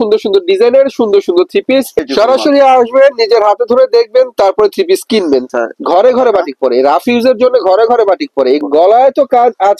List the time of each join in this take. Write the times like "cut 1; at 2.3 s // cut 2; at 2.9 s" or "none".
cut 1; at 2.0 s // cut 2; at 5.4 s // cut 3; at 8.6 s